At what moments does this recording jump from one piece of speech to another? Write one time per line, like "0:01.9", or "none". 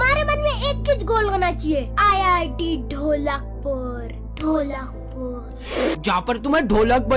none